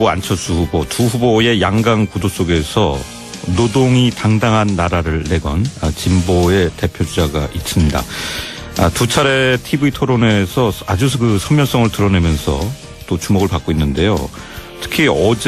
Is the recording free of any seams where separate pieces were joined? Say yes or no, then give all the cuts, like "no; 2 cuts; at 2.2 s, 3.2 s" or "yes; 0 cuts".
yes; 0 cuts